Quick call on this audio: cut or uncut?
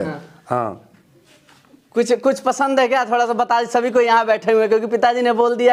uncut